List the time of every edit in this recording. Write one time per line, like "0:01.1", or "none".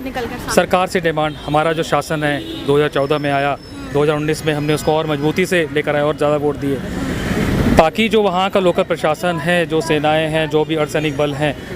none